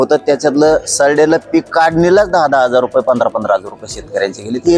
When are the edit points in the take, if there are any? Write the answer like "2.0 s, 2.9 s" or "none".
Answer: none

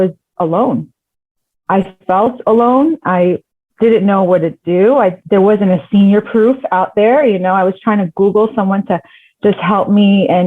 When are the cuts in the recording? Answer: 5.2 s

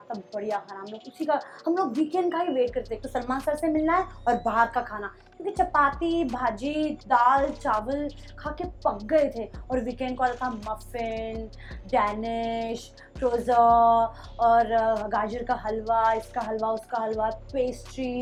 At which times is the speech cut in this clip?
none

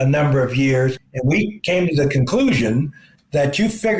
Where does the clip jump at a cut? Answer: 1.0 s

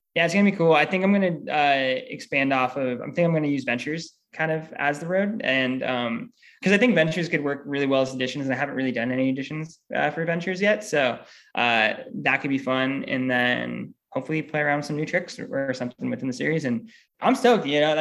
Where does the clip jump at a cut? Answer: 17.0 s

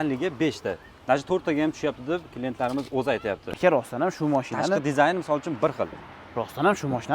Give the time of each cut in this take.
3.4 s

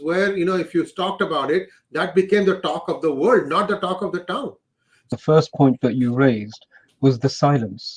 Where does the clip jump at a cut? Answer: 5.0 s

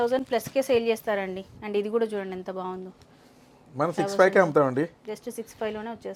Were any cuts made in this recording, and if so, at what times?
none

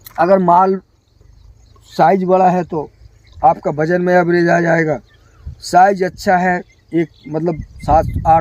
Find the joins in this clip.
none

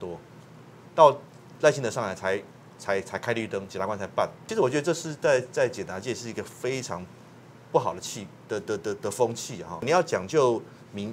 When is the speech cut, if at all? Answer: 4.5 s, 9.8 s

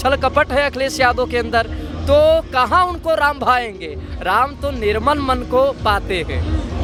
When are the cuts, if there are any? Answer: none

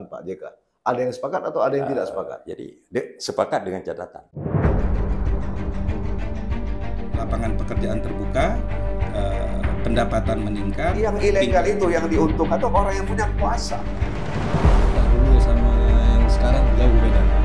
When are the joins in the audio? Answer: 4.3 s

